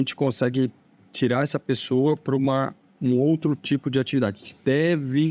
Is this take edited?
no; 0 cuts

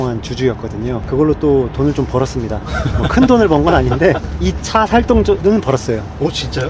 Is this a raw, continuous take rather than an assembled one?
no; 3 cuts; at 1.0 s, 4.3 s, 5.4 s

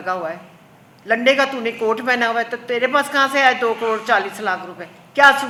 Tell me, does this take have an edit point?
no; 0 cuts

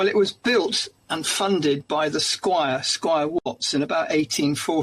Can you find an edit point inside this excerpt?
no; 0 cuts

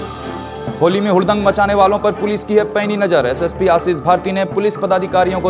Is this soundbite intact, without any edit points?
yes; 0 cuts

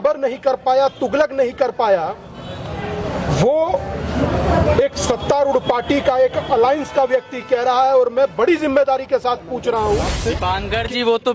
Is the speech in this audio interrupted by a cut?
yes; 1 cut; at 10.1 s

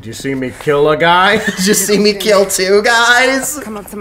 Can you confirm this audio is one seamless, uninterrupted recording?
yes; 0 cuts

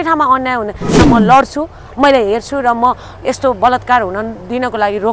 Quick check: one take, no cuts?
no; 1 cut; at 0.9 s

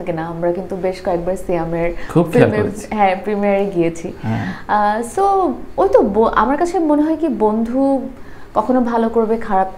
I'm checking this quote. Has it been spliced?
no; 0 cuts

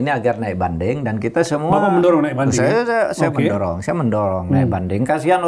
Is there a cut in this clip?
no; 0 cuts

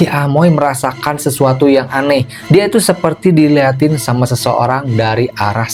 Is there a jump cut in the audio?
no; 0 cuts

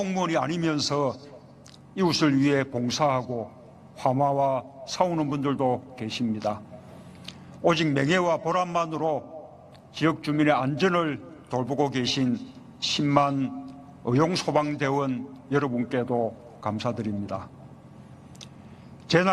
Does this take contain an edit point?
yes; 1 cut; at 17.3 s

